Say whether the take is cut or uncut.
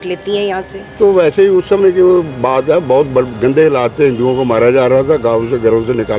cut